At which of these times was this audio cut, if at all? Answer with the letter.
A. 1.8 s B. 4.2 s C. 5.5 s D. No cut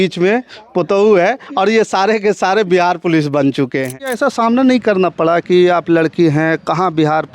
B